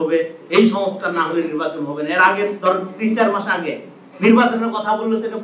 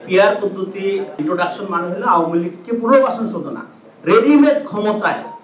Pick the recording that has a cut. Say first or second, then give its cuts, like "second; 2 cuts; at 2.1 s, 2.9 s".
second; 1 cut; at 1.2 s